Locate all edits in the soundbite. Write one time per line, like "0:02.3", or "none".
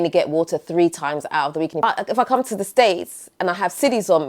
0:01.8